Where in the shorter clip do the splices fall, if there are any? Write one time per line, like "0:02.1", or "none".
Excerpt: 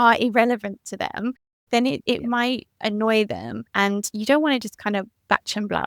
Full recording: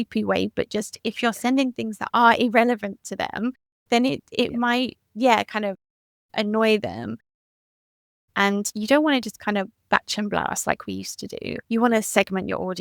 0:02.1
0:03.6